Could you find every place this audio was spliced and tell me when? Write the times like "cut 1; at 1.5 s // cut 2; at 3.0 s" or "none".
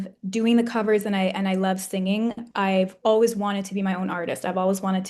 none